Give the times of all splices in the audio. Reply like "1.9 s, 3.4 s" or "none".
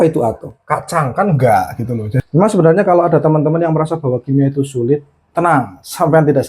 2.1 s